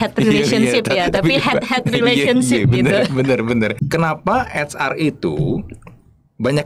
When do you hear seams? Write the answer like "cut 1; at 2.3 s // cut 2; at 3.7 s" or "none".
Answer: cut 1; at 3.8 s

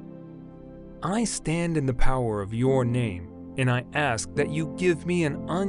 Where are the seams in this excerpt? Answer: cut 1; at 1.0 s

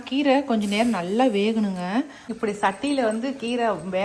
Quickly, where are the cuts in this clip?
cut 1; at 2.2 s

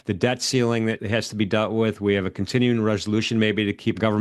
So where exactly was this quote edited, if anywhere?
none

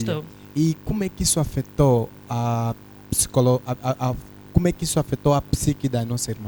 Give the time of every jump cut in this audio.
none

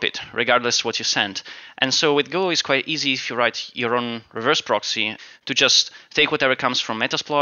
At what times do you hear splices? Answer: none

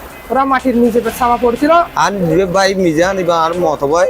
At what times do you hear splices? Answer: cut 1; at 1.9 s

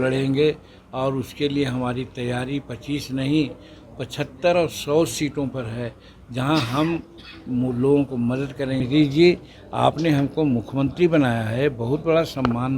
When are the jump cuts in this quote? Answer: cut 1; at 8.8 s

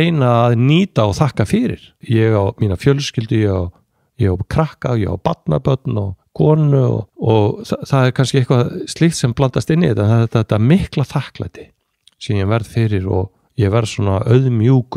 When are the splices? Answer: cut 1; at 1.9 s // cut 2; at 7.1 s

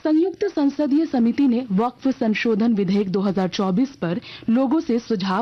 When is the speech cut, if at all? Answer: none

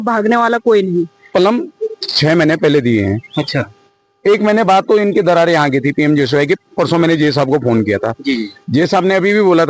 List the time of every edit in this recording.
cut 1; at 1.3 s

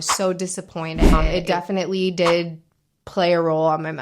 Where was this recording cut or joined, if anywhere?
cut 1; at 1.2 s

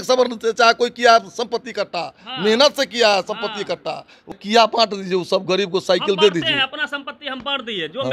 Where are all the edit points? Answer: cut 1; at 4.3 s

